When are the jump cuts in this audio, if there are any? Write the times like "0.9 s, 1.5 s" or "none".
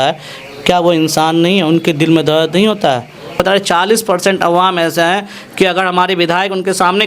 3.4 s